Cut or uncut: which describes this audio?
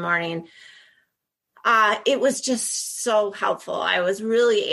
uncut